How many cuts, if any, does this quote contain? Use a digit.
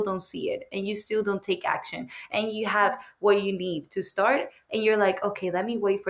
0